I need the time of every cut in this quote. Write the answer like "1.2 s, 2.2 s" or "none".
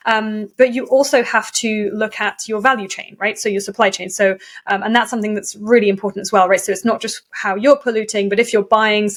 none